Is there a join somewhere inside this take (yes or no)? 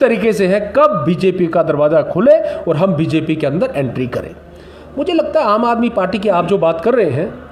no